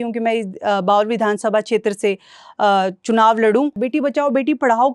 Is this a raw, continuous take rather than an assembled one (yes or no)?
no